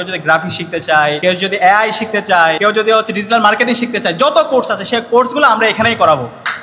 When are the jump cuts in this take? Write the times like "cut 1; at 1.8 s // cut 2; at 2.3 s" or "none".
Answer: cut 1; at 1.2 s // cut 2; at 2.6 s